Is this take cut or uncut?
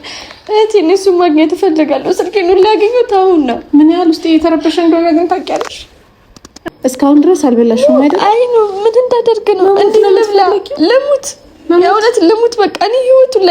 cut